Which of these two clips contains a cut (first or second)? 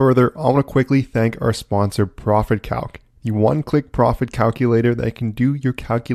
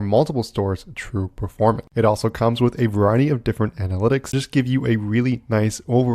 second